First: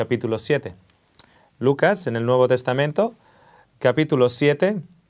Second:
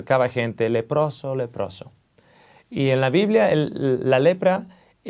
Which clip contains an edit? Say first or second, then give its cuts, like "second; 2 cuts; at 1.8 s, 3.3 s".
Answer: first; 1 cut; at 1.6 s